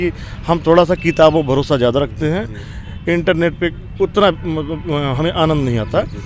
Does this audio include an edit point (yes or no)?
no